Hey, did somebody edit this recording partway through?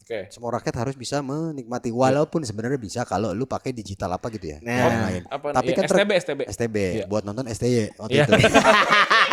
no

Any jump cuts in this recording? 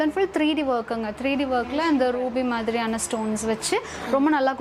no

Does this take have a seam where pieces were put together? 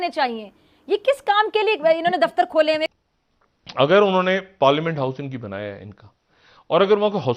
yes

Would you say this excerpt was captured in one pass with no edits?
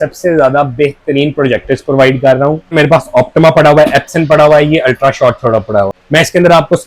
no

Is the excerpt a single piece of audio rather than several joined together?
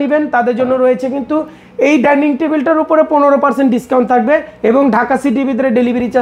yes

